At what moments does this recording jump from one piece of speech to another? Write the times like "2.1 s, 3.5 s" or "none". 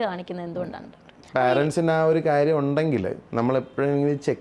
1.1 s, 3.2 s